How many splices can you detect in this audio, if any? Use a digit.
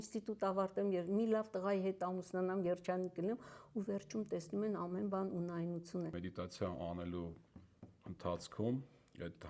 1